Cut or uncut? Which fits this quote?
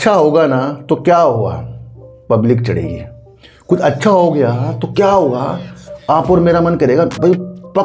uncut